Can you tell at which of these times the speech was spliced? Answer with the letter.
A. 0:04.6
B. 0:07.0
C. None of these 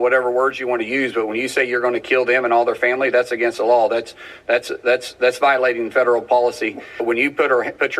B